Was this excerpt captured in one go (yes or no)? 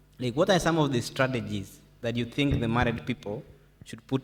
yes